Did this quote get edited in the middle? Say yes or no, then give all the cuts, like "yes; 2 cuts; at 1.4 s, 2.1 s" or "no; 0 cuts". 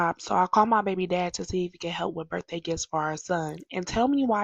no; 0 cuts